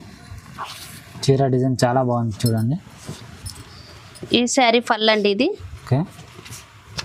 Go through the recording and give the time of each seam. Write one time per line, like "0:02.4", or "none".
none